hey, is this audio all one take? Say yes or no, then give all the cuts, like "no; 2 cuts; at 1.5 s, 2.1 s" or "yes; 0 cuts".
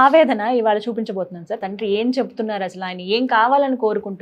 no; 1 cut; at 1.6 s